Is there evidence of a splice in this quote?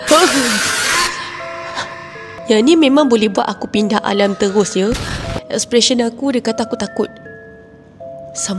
yes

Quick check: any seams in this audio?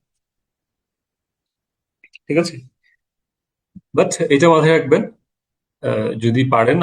no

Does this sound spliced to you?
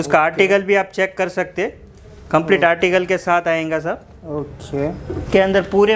no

